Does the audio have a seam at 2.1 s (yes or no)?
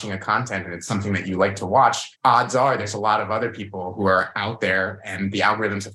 yes